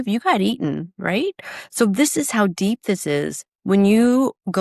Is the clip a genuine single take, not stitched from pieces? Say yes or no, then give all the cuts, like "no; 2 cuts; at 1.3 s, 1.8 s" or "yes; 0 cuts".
yes; 0 cuts